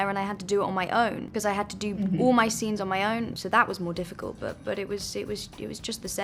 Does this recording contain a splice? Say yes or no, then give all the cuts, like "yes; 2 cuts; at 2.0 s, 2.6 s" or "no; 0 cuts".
yes; 2 cuts; at 1.3 s, 3.4 s